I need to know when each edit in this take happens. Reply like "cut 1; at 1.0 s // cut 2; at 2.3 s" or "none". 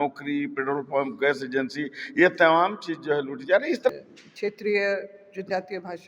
cut 1; at 3.9 s